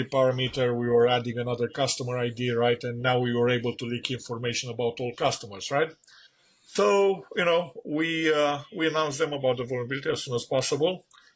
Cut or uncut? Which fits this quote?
uncut